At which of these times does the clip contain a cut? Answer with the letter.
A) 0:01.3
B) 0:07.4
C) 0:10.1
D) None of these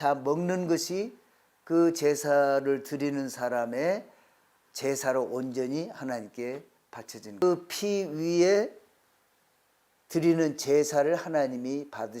B